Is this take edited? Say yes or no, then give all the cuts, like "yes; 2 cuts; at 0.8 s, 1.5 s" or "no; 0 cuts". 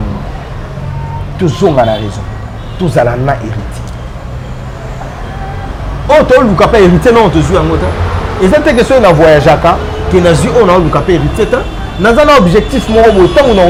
no; 0 cuts